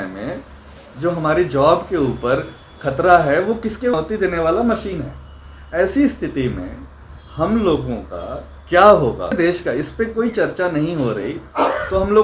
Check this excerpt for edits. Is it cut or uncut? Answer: cut